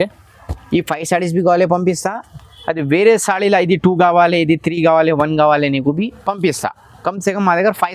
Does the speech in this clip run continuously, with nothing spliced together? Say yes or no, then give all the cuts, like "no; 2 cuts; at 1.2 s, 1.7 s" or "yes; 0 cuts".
yes; 0 cuts